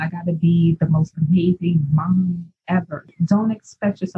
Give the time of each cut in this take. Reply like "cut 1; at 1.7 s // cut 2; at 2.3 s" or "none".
cut 1; at 3.1 s

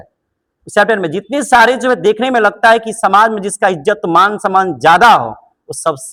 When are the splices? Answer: none

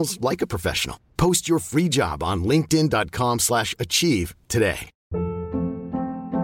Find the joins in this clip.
cut 1; at 4.9 s

